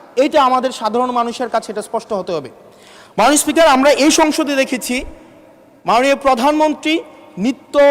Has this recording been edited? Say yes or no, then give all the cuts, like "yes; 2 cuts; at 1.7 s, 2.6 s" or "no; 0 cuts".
no; 0 cuts